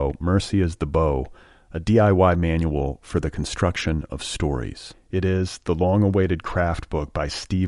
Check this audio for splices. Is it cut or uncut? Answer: uncut